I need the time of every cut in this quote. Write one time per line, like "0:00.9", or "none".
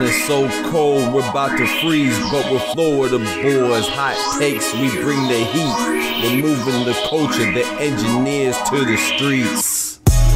none

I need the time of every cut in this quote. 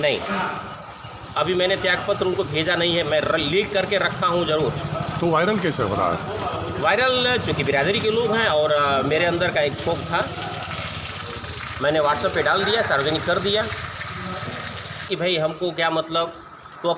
0:15.1

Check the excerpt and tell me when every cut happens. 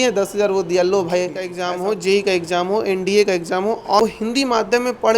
0:01.6
0:04.0

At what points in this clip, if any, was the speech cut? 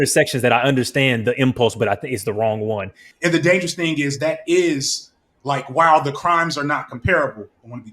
0:02.9

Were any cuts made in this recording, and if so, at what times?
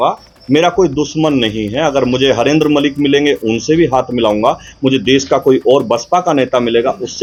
none

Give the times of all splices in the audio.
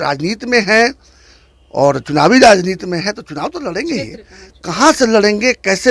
none

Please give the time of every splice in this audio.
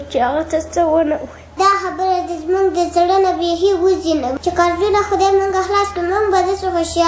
0:01.5
0:04.3

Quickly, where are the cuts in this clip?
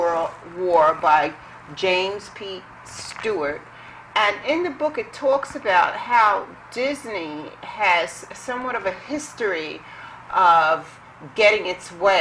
0:05.7

